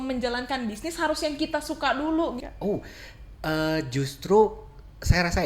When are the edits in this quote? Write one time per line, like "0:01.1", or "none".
0:02.4

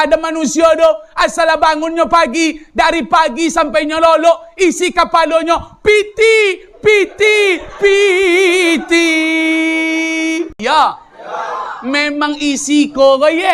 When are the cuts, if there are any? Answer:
0:10.6

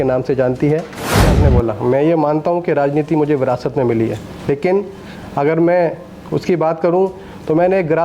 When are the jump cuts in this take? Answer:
0:01.3

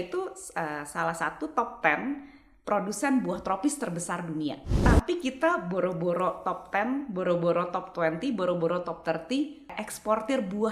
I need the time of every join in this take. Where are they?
0:04.7
0:09.7

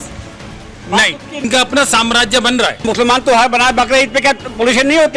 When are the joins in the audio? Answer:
0:01.4
0:02.8

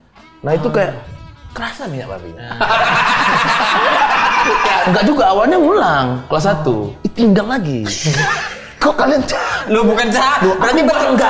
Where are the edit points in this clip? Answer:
0:04.9

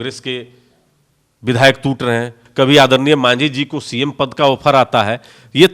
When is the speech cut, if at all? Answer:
0:02.4

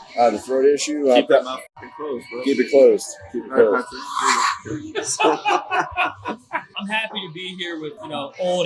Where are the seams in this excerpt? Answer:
0:06.7

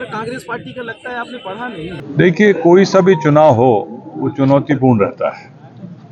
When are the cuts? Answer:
0:02.0

